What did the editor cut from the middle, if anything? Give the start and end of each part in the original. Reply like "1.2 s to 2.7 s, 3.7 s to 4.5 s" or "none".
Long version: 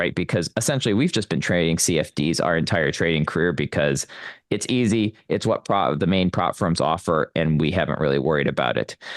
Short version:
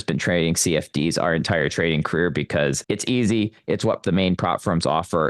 4.0 s to 4.4 s, 5.6 s to 6.0 s